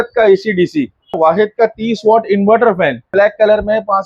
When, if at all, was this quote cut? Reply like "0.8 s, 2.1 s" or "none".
1.2 s, 3.1 s